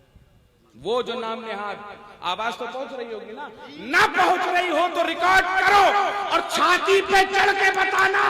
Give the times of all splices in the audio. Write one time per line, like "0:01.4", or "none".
none